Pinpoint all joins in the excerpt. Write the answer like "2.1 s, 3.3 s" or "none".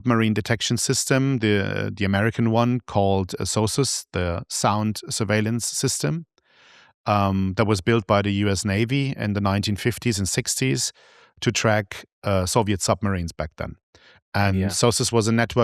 none